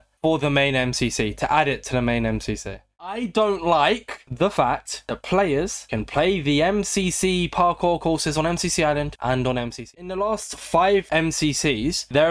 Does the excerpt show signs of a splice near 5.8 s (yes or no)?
no